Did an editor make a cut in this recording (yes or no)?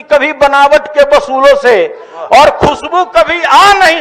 no